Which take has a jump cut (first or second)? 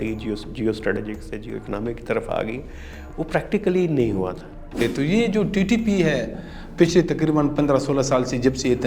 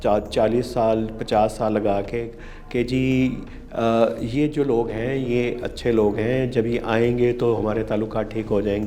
first